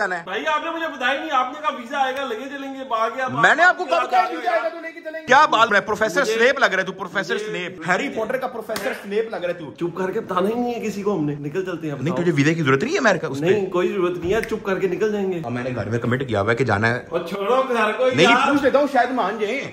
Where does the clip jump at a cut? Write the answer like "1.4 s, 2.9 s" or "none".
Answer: 5.2 s, 9.7 s, 15.5 s